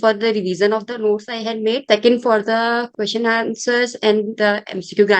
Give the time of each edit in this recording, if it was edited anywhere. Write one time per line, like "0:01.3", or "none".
0:01.8
0:02.9